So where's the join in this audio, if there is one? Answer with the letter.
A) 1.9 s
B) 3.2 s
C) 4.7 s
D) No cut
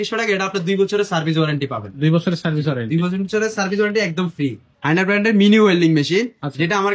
C